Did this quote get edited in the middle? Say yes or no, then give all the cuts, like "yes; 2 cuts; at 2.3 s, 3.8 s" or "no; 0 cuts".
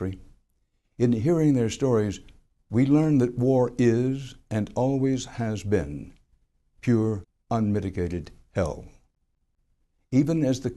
yes; 1 cut; at 8.1 s